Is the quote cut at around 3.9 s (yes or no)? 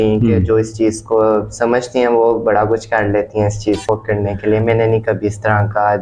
yes